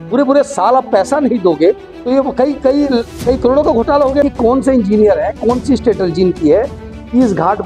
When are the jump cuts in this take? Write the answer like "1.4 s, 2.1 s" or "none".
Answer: 4.2 s